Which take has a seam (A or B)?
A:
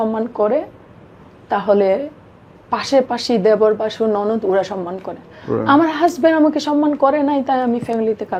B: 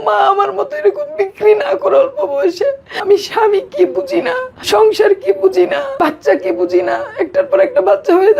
B